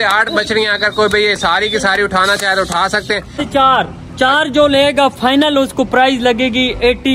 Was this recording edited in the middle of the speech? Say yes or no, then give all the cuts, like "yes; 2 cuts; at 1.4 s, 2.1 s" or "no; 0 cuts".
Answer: yes; 1 cut; at 3.4 s